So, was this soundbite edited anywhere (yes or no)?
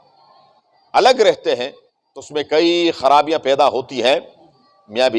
no